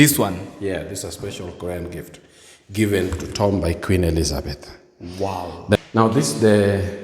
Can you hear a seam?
yes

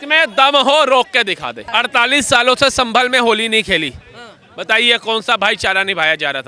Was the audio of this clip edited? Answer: yes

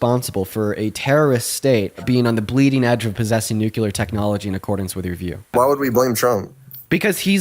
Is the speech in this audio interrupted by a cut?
yes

